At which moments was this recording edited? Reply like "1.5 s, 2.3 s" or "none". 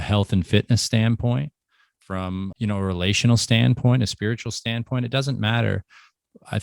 2.5 s